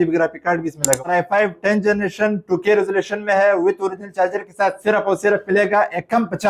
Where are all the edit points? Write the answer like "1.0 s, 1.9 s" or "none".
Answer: 1.0 s